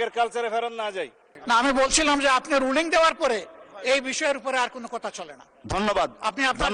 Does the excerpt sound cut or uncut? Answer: cut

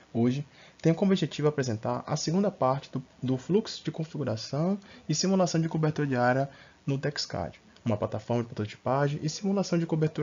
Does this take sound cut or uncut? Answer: uncut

